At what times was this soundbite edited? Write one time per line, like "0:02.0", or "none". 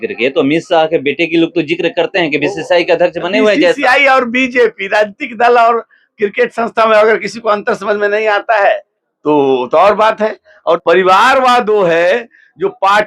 0:10.8